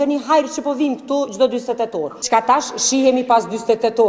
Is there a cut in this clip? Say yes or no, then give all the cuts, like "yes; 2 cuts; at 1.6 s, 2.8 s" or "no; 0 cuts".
yes; 1 cut; at 2.3 s